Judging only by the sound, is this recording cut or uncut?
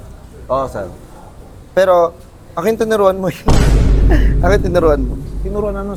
uncut